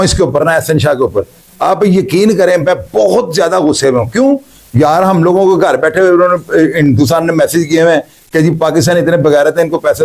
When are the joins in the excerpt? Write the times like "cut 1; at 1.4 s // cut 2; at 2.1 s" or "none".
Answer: none